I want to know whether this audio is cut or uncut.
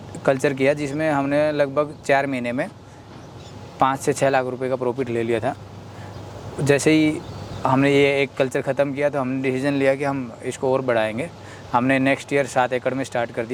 uncut